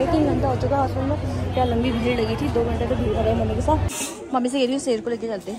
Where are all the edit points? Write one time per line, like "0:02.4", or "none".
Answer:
0:03.9